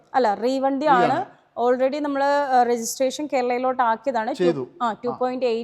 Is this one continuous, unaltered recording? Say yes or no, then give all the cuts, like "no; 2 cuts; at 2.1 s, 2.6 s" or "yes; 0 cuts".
yes; 0 cuts